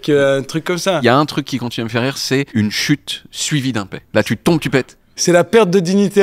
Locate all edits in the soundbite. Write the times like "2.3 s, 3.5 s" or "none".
1.0 s, 2.5 s, 4.0 s, 5.2 s